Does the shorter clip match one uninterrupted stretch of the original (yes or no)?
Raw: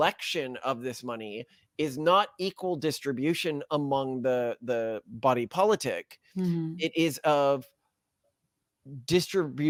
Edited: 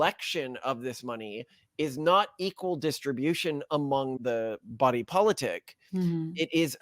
no